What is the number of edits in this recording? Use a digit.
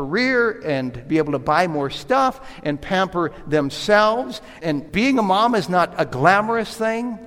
1